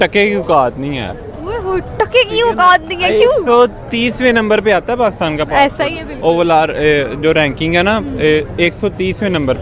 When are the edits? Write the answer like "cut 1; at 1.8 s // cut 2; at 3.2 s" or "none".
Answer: none